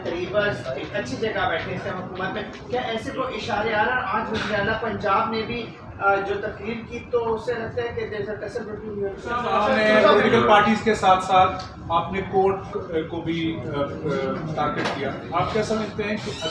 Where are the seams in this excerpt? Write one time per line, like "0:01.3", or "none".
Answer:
0:09.4